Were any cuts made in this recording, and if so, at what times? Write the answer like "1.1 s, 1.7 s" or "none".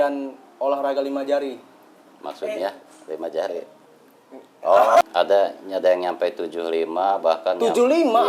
5.0 s